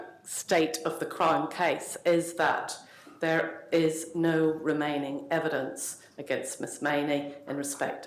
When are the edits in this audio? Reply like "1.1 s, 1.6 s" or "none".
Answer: none